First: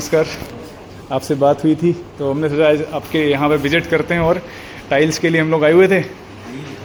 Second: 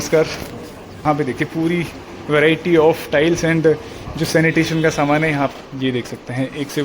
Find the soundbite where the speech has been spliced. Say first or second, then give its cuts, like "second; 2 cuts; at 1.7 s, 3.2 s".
second; 2 cuts; at 1.0 s, 5.5 s